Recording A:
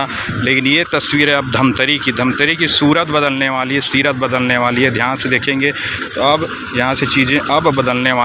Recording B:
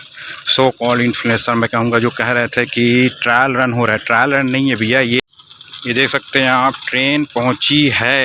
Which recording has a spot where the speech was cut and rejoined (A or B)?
B